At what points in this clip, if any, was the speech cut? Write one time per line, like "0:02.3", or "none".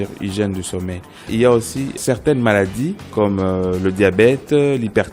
0:01.3
0:02.0
0:03.1